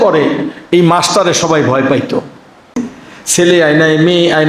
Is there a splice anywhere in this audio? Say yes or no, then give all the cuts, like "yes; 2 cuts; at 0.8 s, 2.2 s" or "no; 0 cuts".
yes; 1 cut; at 2.8 s